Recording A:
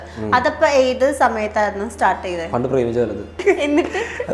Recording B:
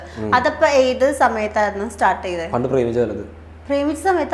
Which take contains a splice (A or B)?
A